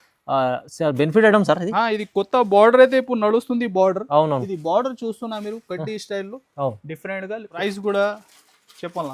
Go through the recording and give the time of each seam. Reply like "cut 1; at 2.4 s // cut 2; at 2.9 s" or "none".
cut 1; at 7.6 s